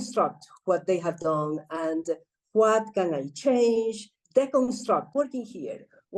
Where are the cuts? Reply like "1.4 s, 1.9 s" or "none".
4.1 s, 5.1 s

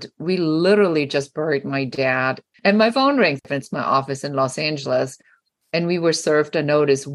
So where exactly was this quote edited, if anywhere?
2.5 s, 3.4 s

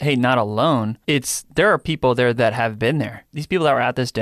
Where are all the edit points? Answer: 1.0 s, 3.3 s

